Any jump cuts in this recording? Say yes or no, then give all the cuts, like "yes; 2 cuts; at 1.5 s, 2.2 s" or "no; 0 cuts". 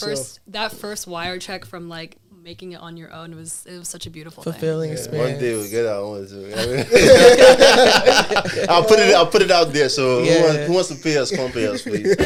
no; 0 cuts